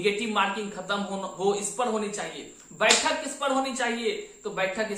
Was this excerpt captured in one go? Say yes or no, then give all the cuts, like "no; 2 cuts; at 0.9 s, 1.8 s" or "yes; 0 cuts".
yes; 0 cuts